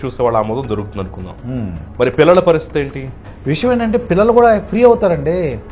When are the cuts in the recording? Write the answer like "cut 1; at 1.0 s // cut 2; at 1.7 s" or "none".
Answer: cut 1; at 3.3 s